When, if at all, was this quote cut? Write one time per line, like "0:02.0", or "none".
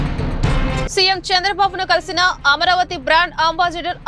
0:00.9